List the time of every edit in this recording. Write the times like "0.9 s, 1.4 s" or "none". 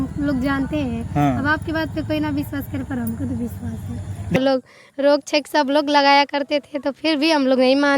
4.4 s